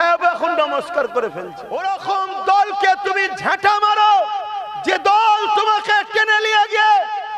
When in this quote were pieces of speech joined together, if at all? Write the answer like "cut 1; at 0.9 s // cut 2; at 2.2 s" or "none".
cut 1; at 1.6 s